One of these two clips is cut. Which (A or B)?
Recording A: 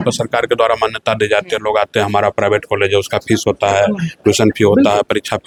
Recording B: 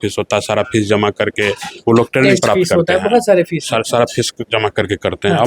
B